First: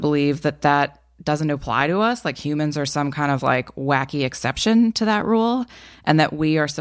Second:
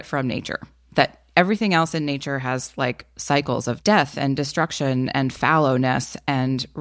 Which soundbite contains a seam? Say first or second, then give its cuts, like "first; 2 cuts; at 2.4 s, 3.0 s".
second; 1 cut; at 3.8 s